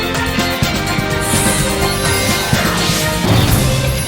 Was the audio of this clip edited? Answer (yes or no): no